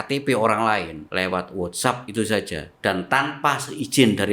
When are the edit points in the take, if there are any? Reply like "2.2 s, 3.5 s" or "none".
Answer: 1.0 s, 2.6 s